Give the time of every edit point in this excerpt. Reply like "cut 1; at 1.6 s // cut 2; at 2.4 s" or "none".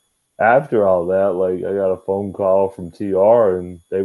none